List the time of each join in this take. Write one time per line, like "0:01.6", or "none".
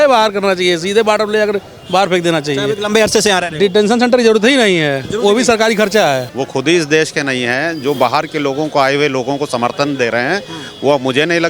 0:06.3

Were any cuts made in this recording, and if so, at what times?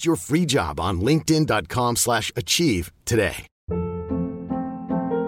0:03.5

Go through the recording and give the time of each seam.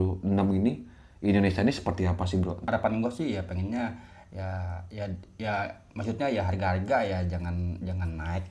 0:02.6

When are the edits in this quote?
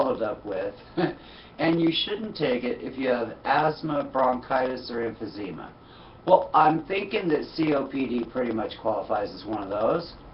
0:02.5

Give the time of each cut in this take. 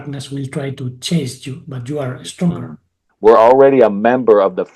0:03.0

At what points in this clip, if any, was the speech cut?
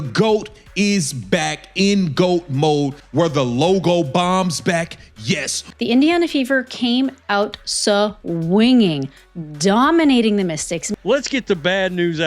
0:03.0
0:05.6
0:10.9

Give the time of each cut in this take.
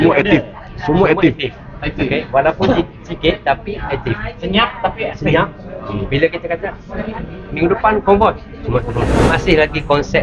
0:09.3

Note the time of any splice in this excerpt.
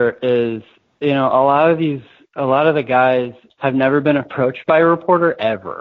0:03.4

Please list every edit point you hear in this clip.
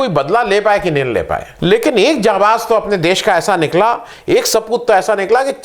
0:01.4

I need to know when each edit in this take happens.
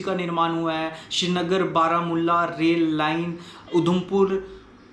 none

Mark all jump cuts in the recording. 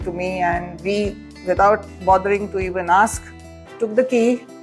0:01.3

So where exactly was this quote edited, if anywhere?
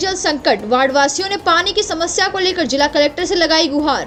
none

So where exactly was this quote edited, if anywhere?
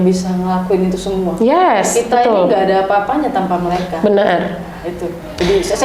none

